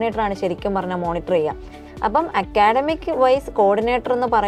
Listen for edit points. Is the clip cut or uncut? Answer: uncut